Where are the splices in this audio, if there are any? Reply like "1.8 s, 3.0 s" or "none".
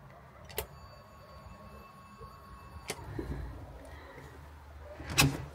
3.0 s

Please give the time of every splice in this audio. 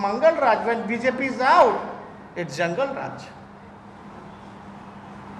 none

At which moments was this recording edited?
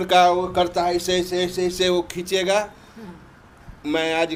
none

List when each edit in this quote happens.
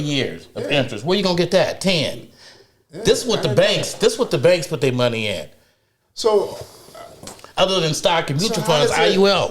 none

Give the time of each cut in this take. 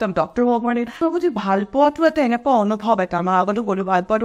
1.0 s

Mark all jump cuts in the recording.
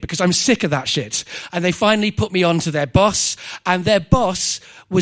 1.4 s

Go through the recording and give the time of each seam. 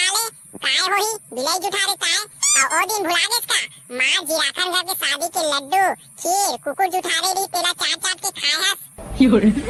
none

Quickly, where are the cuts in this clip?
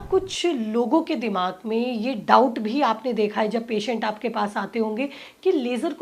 none

